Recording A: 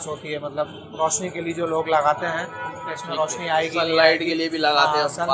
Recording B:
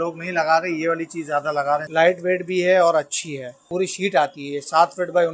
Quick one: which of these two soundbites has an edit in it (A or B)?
B